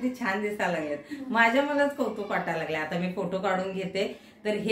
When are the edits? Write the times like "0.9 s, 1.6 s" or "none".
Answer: none